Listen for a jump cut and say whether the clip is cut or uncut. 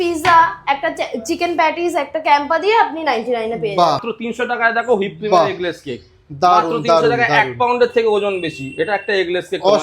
cut